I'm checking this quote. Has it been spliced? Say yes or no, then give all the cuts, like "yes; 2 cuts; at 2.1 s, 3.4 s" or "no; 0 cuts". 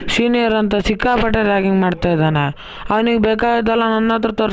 no; 0 cuts